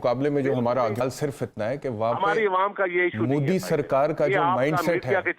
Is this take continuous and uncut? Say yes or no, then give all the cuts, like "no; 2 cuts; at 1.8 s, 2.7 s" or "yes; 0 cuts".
no; 1 cut; at 1.0 s